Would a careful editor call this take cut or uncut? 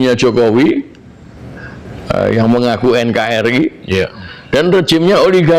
uncut